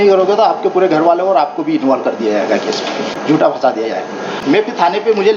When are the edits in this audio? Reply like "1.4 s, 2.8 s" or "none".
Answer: 3.1 s, 4.3 s